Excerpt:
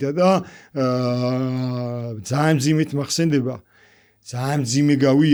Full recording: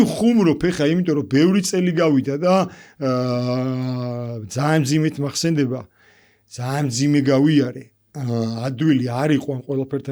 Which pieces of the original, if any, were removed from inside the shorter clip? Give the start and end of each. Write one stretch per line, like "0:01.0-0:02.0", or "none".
none